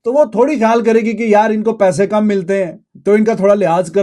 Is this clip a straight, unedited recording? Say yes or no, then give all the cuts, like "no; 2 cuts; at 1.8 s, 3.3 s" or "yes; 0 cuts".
no; 1 cut; at 2.8 s